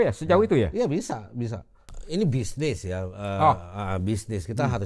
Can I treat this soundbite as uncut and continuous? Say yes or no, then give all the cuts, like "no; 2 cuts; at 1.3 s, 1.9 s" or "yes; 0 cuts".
no; 1 cut; at 1.9 s